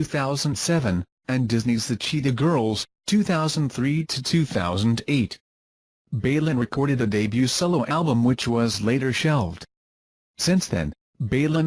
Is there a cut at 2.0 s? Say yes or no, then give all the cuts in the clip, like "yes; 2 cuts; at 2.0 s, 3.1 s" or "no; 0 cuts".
no; 1 cut; at 9.3 s